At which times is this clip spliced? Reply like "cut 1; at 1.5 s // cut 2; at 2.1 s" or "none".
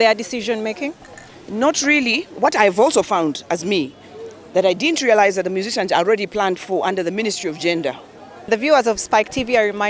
cut 1; at 8.5 s

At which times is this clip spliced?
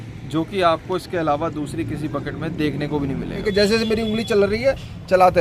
cut 1; at 3.5 s

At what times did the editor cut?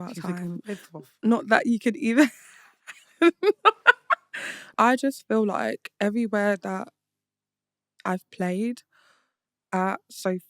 cut 1; at 4.6 s

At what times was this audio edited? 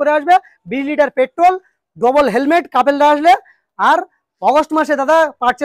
none

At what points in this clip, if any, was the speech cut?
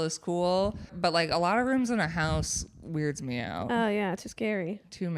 cut 1; at 0.9 s

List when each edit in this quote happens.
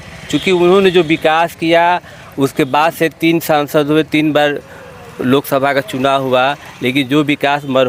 none

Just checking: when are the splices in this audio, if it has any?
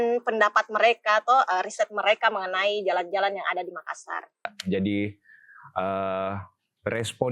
cut 1; at 4.5 s

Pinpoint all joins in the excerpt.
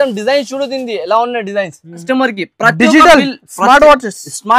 cut 1; at 2.0 s

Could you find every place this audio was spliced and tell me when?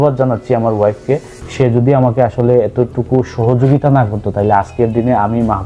none

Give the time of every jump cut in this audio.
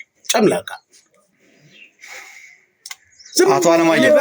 none

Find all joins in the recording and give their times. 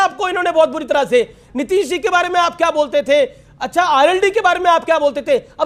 none

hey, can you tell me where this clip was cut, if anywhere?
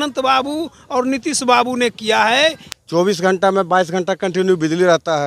cut 1; at 2.7 s

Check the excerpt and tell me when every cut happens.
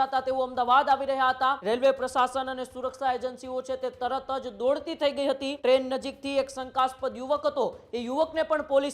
cut 1; at 1.6 s // cut 2; at 5.5 s

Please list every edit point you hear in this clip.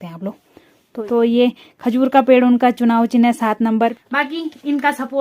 cut 1; at 0.9 s // cut 2; at 3.9 s

